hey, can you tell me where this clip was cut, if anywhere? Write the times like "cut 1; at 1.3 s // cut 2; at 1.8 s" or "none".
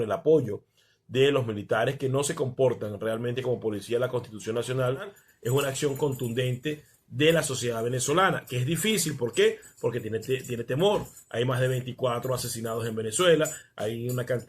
cut 1; at 5.2 s